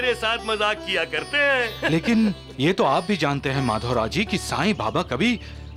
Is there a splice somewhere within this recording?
no; 0 cuts

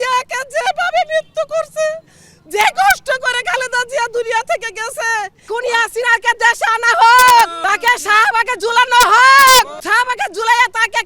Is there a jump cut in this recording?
yes; 3 cuts; at 5.4 s, 7.6 s, 9.8 s

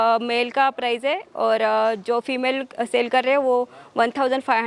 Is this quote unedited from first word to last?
yes; 0 cuts

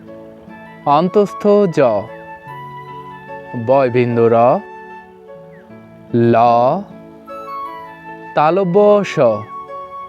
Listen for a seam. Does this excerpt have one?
no; 0 cuts

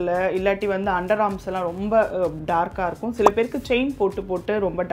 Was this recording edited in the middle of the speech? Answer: no; 0 cuts

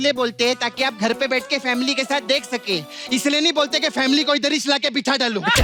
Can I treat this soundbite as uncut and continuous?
yes; 0 cuts

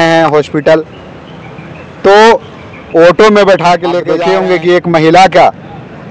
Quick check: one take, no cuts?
no; 1 cut; at 4.1 s

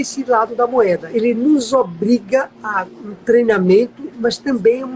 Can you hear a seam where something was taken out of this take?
yes; 2 cuts; at 1.1 s, 2.6 s

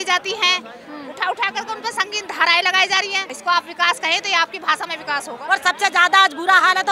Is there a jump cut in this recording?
yes; 2 cuts; at 3.2 s, 5.3 s

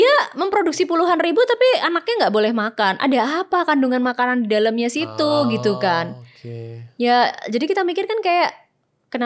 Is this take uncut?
yes; 0 cuts

